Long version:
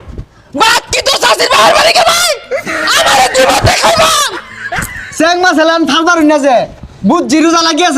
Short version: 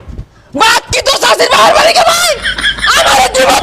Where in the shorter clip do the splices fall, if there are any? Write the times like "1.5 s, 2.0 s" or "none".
none